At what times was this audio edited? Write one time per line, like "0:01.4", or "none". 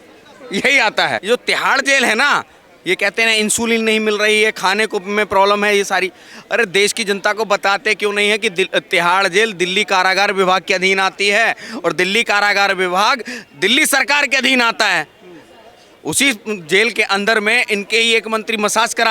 0:01.2